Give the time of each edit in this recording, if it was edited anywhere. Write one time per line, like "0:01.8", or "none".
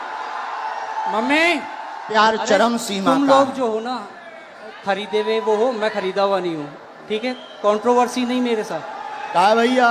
0:02.1

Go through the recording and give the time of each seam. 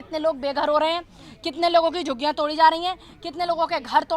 none

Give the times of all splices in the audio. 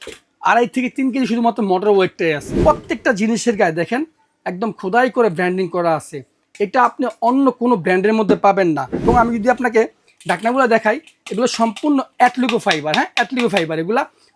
0:02.5
0:09.1

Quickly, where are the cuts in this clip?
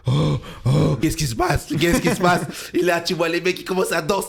0:01.0

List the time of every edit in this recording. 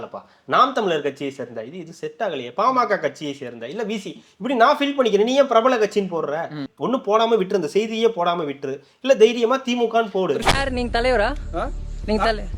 0:06.6
0:10.4

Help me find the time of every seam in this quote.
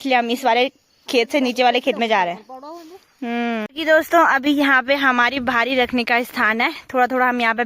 0:03.7

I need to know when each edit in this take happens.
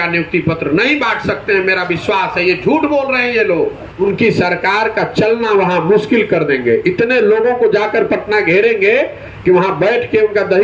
0:04.0

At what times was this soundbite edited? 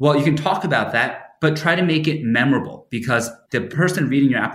0:03.5

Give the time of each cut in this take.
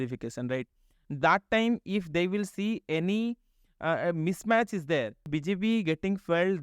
0:05.3

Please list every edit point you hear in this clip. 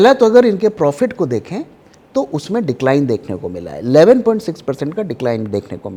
none

